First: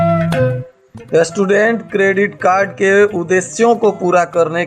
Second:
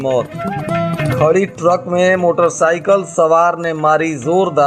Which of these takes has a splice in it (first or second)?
first